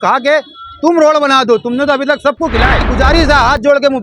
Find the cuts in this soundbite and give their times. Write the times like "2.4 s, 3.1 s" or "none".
2.9 s